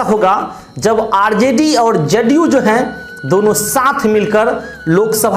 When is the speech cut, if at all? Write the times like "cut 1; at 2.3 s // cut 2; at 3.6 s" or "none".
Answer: none